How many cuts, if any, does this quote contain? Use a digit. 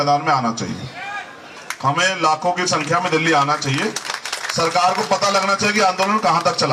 0